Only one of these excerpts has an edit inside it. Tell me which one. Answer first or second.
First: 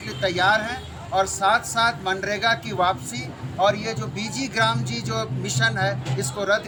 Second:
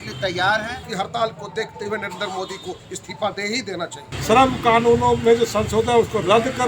second